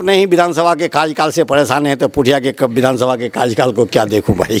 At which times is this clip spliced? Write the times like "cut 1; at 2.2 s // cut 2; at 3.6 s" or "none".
none